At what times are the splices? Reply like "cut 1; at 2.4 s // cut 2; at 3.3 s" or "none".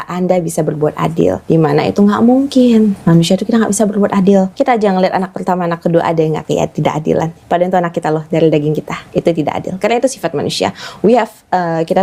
cut 1; at 1.4 s // cut 2; at 4.5 s // cut 3; at 8.9 s